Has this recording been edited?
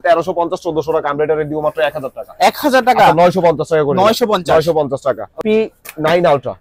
yes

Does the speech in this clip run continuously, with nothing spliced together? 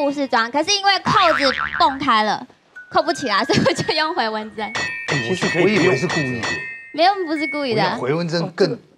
yes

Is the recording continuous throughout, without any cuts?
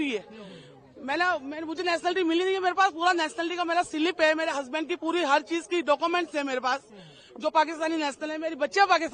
yes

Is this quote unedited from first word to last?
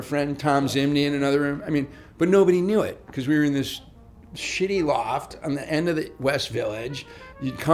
yes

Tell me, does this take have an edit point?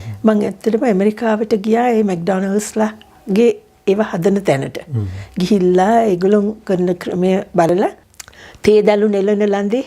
yes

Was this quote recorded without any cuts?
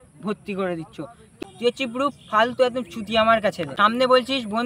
no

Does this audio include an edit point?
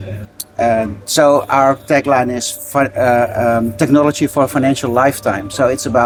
no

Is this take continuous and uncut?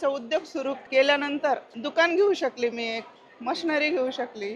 no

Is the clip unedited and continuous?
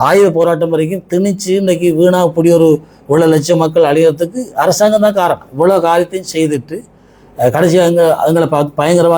yes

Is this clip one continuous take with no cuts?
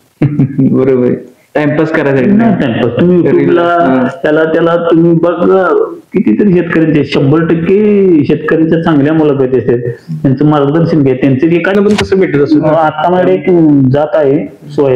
no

